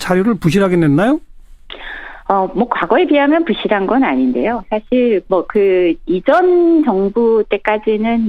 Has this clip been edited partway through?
no; 0 cuts

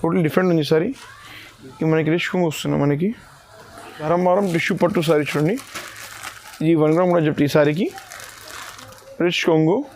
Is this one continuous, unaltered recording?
no; 1 cut; at 4.1 s

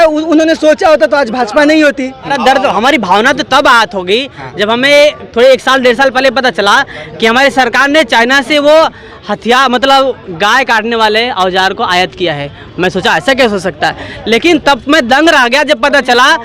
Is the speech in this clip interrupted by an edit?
yes; 1 cut; at 2.4 s

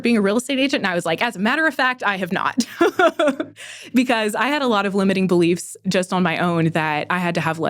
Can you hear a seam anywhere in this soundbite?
no; 0 cuts

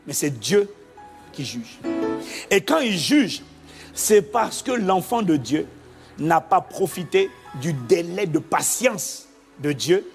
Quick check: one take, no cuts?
no; 1 cut; at 1.7 s

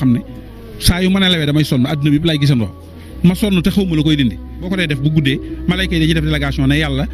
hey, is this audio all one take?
no; 1 cut; at 4.7 s

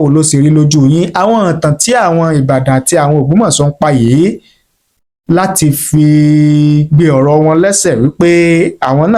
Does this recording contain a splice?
no; 0 cuts

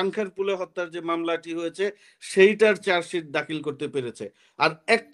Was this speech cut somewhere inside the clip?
no; 0 cuts

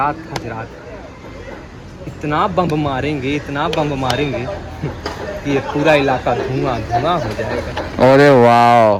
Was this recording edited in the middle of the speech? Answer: no; 0 cuts

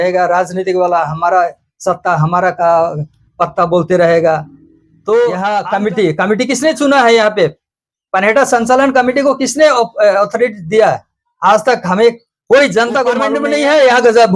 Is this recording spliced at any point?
yes; 2 cuts; at 5.6 s, 13.4 s

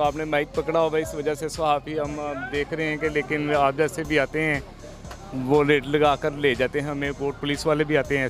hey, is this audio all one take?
yes; 0 cuts

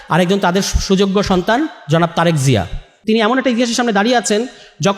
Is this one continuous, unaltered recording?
no; 1 cut; at 3.0 s

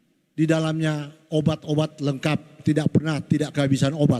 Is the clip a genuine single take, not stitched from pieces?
yes; 0 cuts

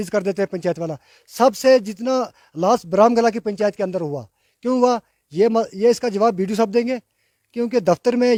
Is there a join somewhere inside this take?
no; 0 cuts

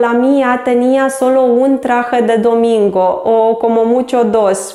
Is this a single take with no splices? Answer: yes; 0 cuts

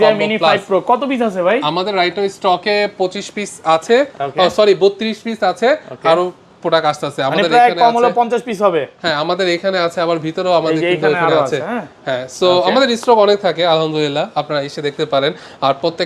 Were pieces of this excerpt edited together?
no; 0 cuts

